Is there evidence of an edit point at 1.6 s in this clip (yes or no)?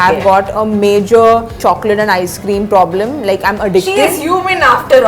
yes